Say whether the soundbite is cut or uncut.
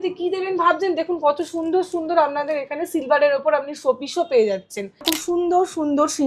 cut